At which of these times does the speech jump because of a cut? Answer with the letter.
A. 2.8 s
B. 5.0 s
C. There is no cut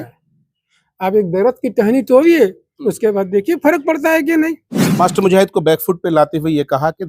B